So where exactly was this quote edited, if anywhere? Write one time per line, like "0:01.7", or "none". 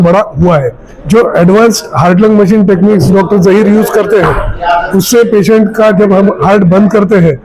0:00.9